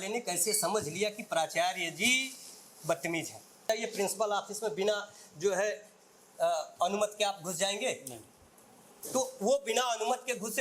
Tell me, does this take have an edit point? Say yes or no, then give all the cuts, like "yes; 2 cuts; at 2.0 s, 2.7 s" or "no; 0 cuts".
yes; 1 cut; at 3.7 s